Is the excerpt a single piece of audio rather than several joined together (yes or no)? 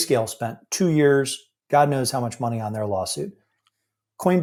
yes